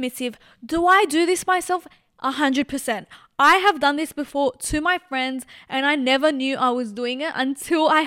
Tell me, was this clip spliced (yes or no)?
no